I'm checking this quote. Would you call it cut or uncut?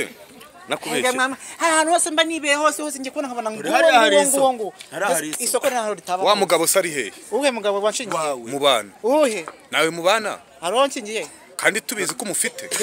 uncut